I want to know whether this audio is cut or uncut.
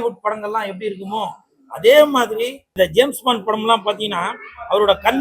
cut